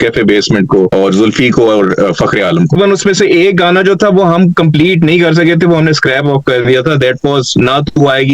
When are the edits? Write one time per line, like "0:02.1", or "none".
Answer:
0:00.9
0:02.8